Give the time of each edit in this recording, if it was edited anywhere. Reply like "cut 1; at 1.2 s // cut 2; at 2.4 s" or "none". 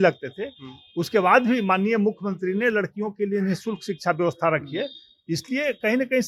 none